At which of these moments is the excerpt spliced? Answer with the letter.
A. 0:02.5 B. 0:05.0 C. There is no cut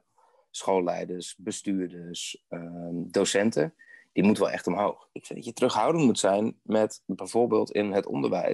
B